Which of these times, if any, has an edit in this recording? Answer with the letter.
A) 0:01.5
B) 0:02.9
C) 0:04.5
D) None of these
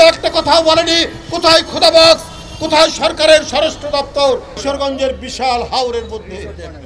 C